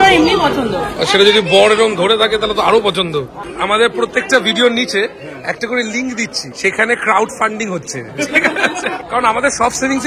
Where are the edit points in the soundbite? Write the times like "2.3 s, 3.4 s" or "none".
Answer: 1.0 s, 3.4 s, 6.4 s, 9.0 s